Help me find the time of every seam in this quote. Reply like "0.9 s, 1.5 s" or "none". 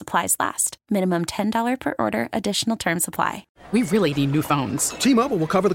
3.5 s